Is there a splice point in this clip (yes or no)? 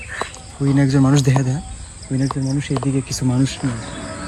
no